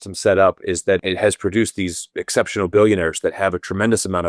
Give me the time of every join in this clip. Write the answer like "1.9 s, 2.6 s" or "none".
1.0 s